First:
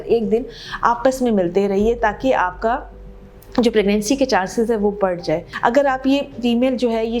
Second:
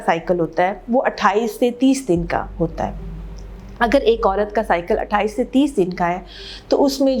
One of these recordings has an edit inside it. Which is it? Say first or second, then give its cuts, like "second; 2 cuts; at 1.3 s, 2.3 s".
first; 1 cut; at 5.5 s